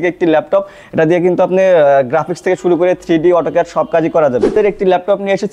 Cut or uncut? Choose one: cut